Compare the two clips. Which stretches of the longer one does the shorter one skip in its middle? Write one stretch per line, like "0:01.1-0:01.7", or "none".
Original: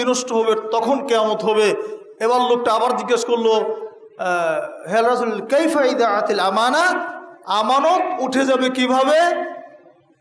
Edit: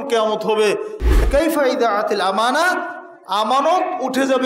0:02.2-0:05.4